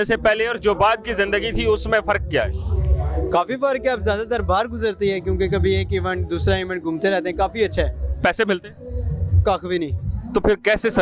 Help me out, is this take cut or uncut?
uncut